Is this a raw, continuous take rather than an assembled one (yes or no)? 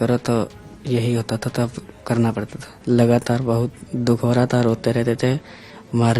no